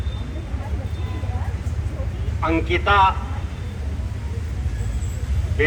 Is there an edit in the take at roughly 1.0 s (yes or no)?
no